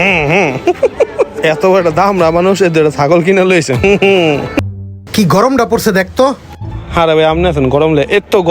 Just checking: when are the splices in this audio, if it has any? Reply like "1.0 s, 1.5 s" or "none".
4.5 s